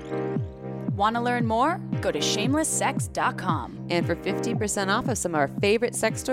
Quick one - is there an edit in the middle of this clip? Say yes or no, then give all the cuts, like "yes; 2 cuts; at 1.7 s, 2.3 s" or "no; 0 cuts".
yes; 1 cut; at 1.0 s